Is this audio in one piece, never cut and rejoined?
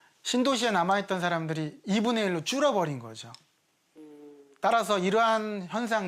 yes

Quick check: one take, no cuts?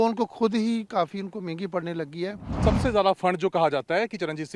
no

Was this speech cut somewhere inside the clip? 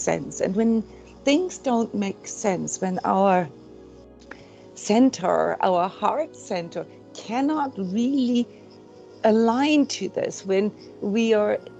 no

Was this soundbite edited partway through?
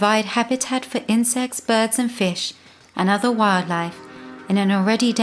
no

